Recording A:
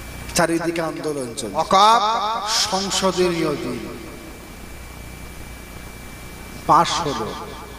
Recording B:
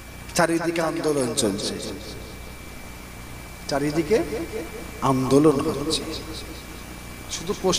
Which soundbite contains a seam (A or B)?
A